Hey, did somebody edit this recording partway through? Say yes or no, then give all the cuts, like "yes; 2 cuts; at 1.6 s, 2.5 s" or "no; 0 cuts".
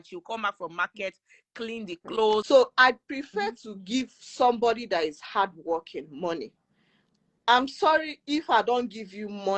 no; 0 cuts